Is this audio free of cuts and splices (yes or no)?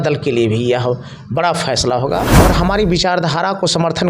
no